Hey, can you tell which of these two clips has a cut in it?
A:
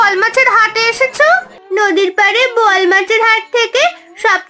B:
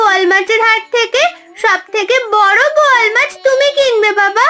A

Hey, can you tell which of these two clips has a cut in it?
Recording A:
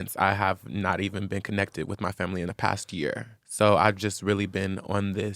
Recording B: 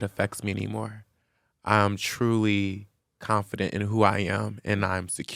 A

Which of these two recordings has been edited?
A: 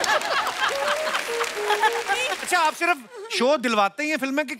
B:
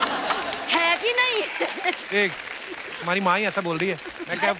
A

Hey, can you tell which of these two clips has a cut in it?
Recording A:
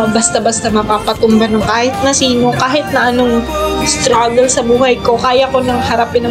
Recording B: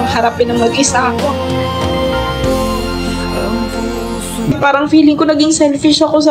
B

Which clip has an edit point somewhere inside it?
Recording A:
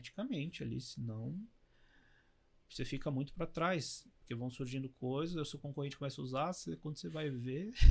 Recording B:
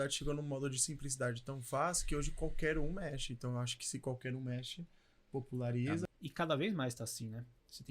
B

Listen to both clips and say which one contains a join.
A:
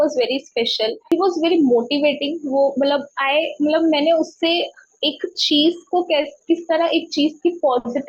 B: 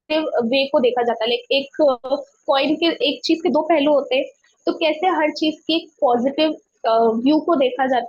A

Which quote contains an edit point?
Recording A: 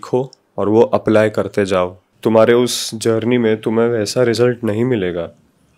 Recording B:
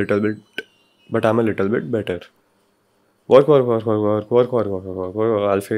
A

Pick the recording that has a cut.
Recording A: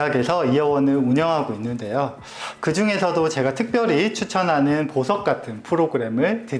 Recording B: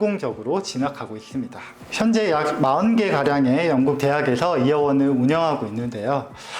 B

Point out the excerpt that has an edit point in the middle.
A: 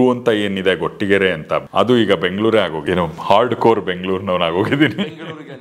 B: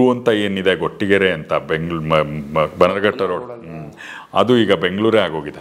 A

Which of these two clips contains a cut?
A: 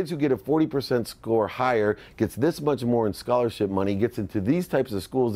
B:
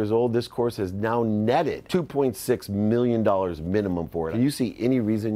B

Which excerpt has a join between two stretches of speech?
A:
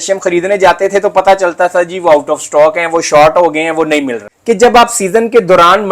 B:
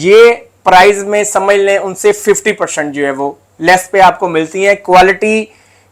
A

